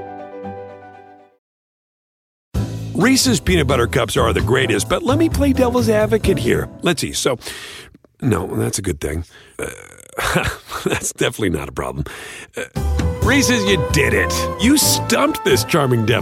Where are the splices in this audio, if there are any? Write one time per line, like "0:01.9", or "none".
none